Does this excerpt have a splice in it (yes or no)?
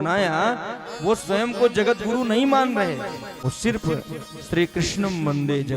yes